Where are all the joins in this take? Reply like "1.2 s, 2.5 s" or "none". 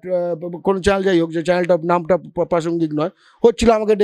none